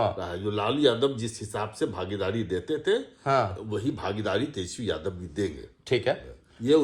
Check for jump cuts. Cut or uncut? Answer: uncut